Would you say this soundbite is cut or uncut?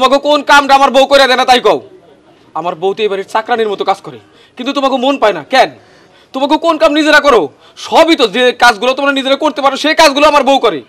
uncut